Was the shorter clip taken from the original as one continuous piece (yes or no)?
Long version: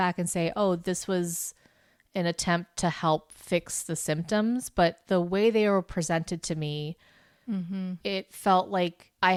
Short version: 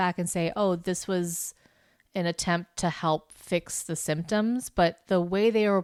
yes